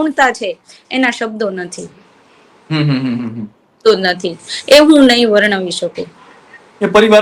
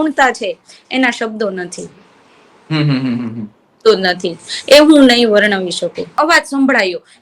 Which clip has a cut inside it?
second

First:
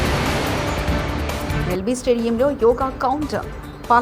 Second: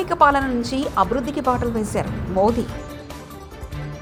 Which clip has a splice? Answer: first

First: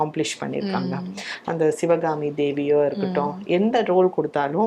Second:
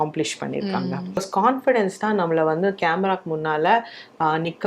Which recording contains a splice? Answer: second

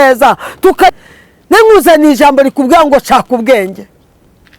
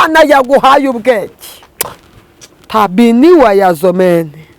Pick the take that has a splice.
first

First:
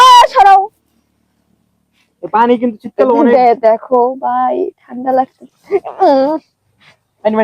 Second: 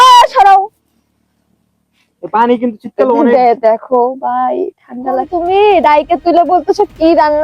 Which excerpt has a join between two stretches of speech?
second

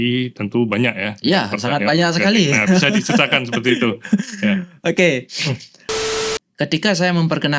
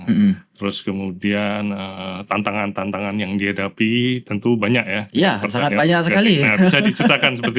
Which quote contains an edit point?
first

